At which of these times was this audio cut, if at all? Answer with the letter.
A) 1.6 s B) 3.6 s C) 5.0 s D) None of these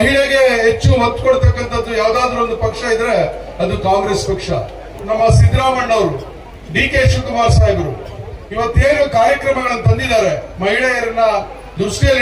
C